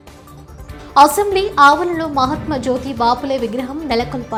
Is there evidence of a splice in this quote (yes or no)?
no